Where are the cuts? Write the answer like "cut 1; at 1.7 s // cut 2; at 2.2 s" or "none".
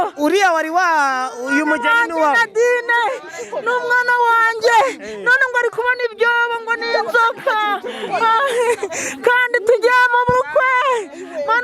none